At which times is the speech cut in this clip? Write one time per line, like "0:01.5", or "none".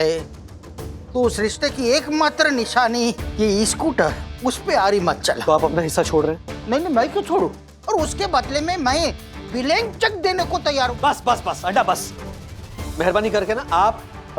0:05.4
0:07.7
0:10.9

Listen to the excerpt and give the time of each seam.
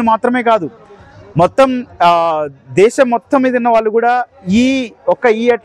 none

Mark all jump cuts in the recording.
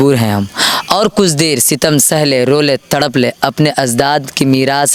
none

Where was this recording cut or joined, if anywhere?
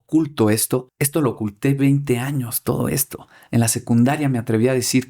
0:01.0

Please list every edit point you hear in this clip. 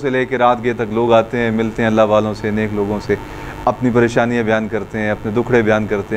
none

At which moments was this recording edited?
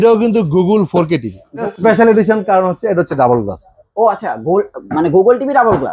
0:01.7

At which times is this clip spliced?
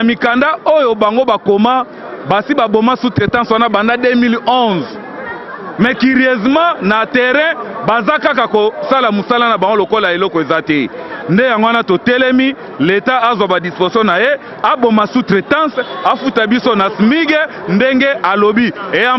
none

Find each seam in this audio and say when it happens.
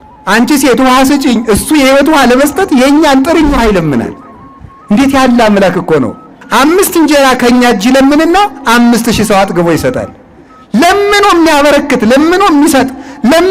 0:06.4

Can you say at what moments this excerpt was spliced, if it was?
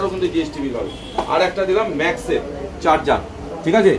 none

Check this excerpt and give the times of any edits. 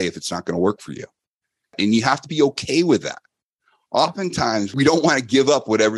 0:01.8
0:04.7

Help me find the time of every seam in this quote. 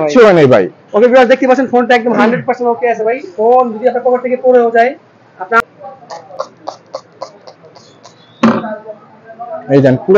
0:05.6

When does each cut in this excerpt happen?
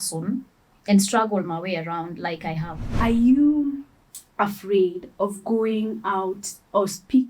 0:02.8

